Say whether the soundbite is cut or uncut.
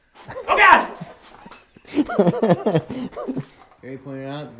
cut